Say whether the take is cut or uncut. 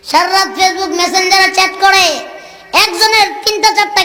uncut